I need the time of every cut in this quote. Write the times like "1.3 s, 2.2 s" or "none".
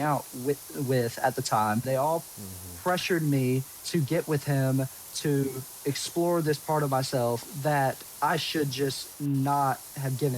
1.8 s, 3.8 s, 5.7 s, 8.1 s